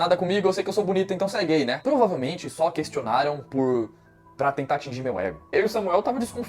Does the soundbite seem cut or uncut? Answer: cut